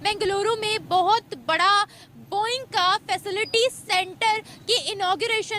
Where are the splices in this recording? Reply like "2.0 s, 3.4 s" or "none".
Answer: none